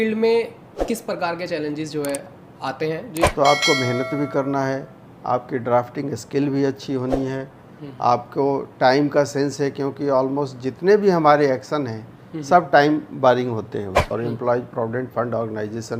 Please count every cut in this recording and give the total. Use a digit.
2